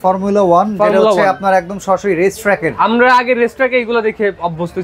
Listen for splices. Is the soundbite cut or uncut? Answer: uncut